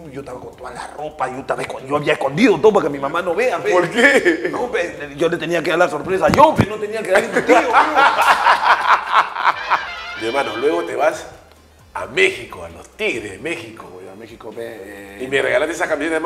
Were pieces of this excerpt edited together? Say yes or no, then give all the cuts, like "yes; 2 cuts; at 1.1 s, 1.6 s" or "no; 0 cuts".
no; 0 cuts